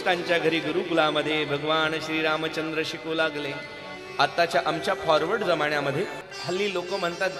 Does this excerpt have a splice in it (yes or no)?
yes